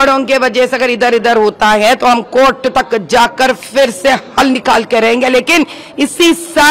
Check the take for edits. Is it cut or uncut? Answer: uncut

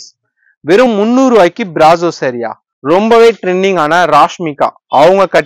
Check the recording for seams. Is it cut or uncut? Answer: cut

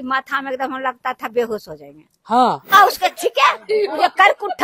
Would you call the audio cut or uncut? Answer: cut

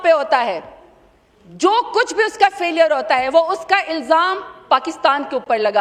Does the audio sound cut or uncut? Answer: uncut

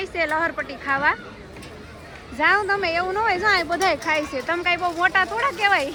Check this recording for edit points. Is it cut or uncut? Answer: uncut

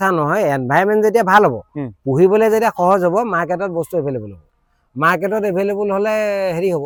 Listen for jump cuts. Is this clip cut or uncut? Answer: uncut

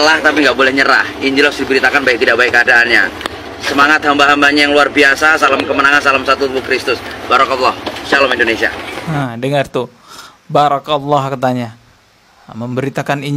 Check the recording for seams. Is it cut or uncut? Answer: uncut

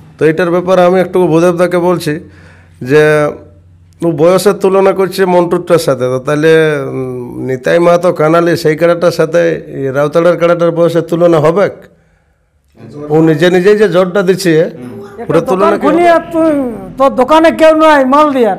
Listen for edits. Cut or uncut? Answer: cut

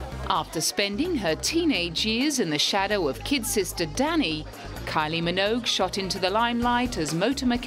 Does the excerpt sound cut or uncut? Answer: uncut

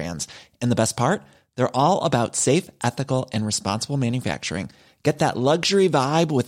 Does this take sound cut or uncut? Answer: uncut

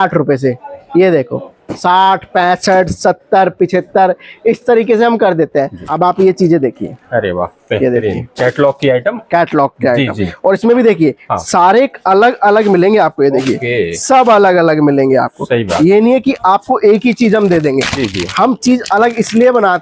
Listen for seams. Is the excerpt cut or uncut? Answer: cut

